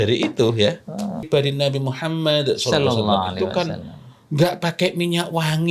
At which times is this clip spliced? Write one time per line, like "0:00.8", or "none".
0:01.3